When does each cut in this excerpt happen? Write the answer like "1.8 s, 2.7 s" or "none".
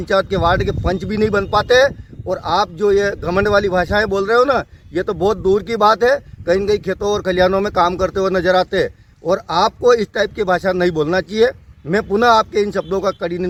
none

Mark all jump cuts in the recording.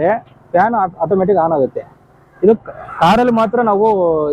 none

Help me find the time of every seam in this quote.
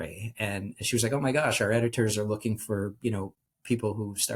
none

